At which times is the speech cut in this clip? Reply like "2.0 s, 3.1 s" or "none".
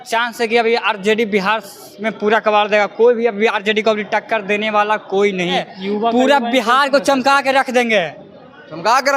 5.7 s